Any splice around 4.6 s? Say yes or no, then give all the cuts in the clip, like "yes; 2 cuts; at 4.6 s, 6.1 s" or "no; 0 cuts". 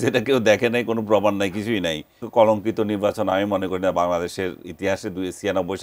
no; 1 cut; at 2.2 s